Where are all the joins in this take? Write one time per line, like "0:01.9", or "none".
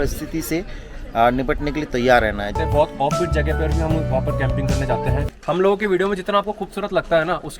0:02.5
0:05.3